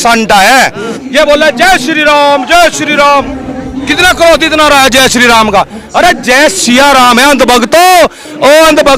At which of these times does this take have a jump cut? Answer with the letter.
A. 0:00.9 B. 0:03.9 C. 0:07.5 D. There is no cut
A